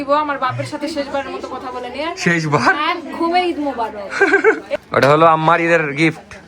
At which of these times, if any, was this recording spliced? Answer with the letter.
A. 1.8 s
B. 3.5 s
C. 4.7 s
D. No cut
C